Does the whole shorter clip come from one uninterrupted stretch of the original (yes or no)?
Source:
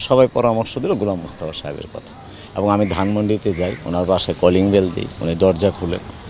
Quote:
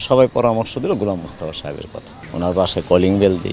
no